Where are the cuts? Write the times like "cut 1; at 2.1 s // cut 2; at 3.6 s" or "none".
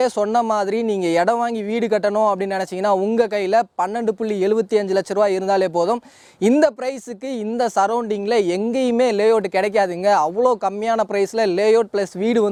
none

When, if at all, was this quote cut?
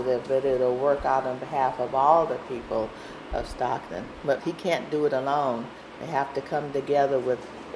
cut 1; at 4.4 s

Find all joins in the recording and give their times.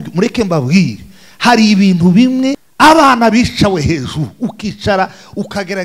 cut 1; at 2.6 s

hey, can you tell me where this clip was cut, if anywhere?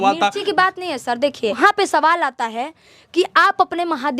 cut 1; at 1.6 s

